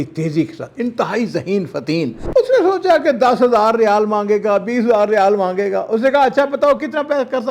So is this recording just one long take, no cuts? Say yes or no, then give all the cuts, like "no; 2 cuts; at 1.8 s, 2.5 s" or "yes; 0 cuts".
no; 1 cut; at 2.2 s